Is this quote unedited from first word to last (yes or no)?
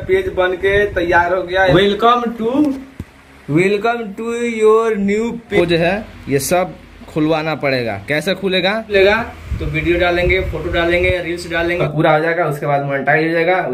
no